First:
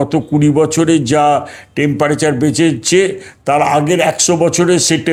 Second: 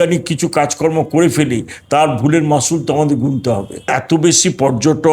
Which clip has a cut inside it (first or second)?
second